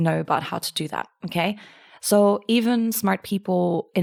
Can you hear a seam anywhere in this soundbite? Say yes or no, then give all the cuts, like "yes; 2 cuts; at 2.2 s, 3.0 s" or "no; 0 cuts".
no; 0 cuts